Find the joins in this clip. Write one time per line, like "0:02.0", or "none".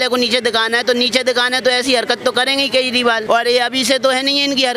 none